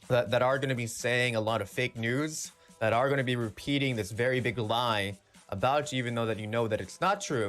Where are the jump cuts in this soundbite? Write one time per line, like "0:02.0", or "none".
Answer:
none